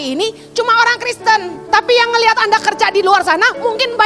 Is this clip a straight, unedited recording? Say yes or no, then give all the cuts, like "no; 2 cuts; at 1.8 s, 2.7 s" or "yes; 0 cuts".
no; 1 cut; at 1.5 s